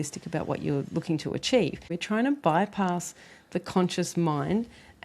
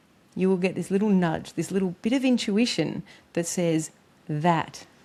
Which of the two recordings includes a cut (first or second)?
first